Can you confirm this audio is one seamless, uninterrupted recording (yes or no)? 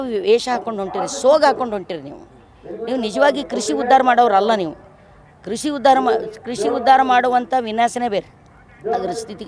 yes